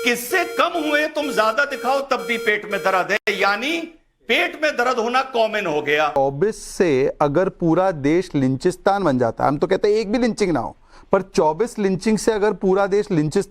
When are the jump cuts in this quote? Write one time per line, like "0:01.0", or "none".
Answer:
0:06.2